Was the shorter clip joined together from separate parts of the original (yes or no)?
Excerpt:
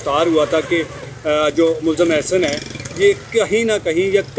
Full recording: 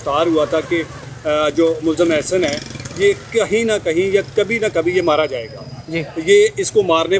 no